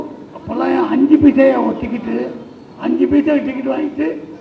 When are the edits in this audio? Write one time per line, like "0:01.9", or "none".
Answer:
none